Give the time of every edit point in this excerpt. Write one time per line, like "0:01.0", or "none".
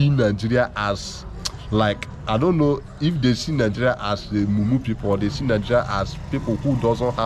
none